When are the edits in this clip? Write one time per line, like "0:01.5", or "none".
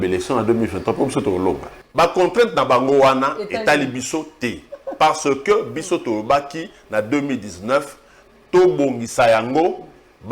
0:01.7